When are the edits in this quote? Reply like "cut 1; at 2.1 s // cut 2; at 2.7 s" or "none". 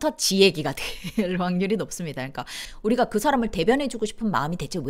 cut 1; at 2.6 s